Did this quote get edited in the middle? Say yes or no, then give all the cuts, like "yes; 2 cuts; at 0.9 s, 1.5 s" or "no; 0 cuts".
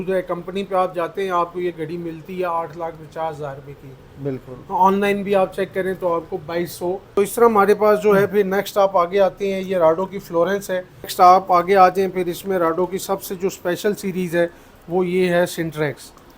yes; 2 cuts; at 7.2 s, 11.1 s